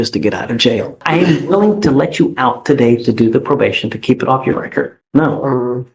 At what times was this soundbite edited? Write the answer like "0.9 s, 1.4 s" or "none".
1.0 s, 5.0 s